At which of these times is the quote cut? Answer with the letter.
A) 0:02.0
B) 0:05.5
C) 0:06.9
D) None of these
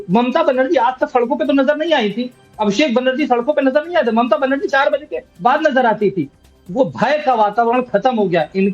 C